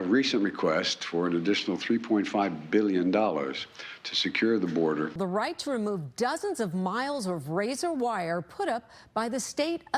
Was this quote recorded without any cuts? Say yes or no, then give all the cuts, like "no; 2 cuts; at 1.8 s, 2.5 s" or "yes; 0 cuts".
no; 1 cut; at 5.1 s